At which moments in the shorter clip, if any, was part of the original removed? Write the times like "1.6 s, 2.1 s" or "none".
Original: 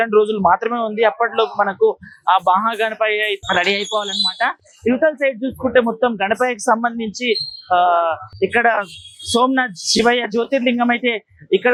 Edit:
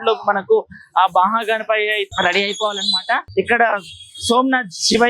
3.2 s